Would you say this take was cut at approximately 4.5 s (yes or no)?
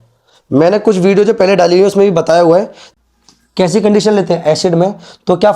no